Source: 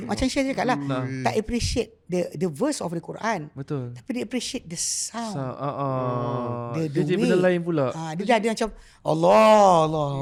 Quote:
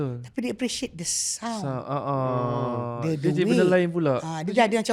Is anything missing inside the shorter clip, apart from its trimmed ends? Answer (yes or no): no